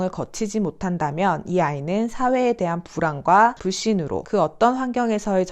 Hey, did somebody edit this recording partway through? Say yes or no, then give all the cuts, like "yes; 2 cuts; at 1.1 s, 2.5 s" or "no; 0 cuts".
no; 0 cuts